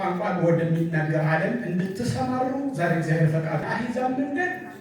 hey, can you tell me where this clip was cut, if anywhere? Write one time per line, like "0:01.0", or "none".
0:03.6